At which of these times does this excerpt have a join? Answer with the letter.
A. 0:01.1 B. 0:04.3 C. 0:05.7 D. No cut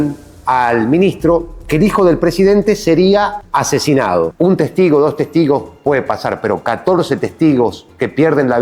B